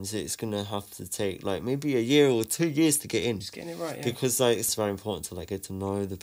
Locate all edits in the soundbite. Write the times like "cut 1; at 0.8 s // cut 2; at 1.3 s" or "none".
cut 1; at 4.7 s